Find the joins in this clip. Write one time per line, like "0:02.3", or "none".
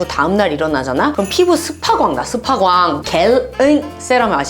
0:03.0